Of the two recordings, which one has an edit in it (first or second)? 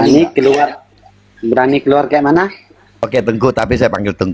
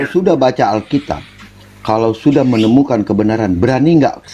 first